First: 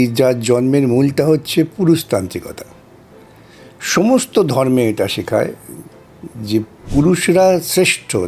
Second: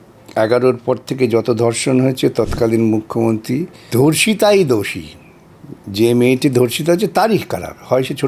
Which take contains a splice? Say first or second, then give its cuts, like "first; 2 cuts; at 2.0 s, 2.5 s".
second; 1 cut; at 3.8 s